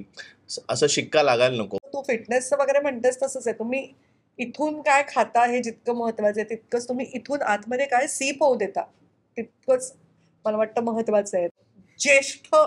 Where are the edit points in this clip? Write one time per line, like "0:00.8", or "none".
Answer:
0:01.9
0:11.6